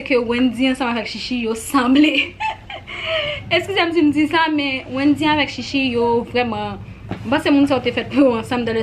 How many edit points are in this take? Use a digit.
0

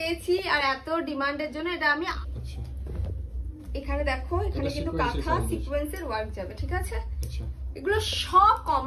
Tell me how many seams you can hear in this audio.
1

